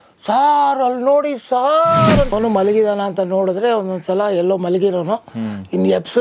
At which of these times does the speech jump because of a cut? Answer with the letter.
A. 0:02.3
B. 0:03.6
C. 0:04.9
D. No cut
A